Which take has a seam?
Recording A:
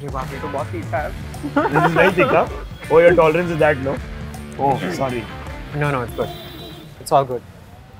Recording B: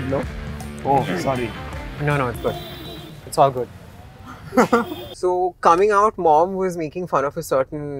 B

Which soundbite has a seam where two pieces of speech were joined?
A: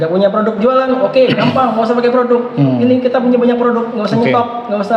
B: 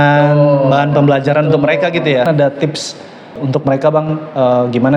B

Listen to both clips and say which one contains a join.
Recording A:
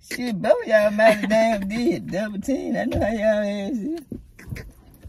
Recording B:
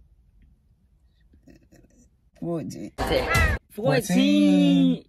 B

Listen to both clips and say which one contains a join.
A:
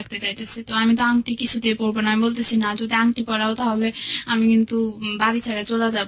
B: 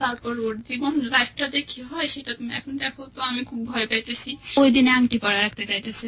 B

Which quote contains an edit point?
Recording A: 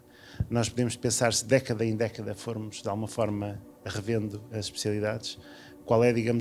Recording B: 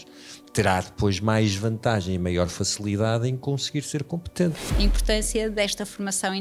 B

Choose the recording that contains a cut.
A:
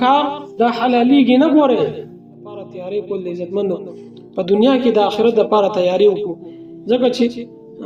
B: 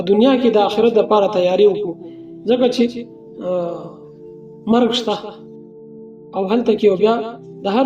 A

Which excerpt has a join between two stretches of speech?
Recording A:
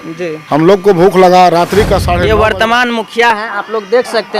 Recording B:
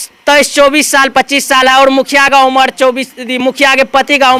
A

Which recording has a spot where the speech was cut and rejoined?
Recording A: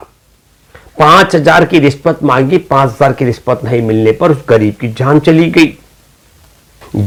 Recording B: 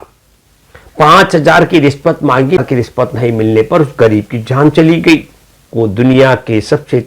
B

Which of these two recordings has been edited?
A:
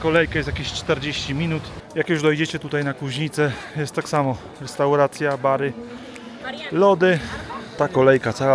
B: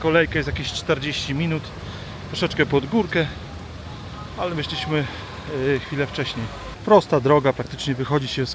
A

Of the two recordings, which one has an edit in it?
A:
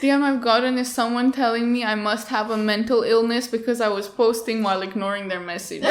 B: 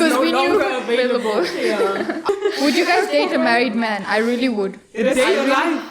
B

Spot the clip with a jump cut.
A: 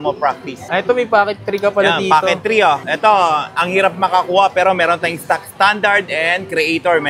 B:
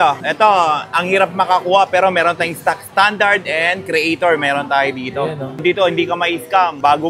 B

